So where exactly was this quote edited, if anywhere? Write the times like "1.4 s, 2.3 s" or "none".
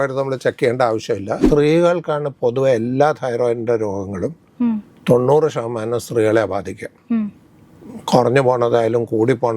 1.4 s